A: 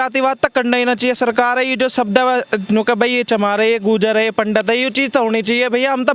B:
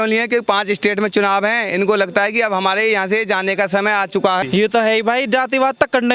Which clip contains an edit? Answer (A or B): B